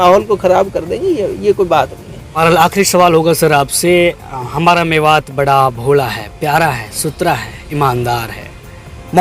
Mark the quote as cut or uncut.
cut